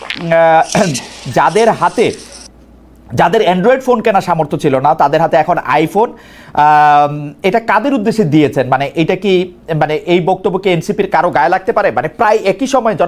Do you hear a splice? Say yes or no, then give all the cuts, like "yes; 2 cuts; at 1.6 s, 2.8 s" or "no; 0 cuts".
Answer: no; 0 cuts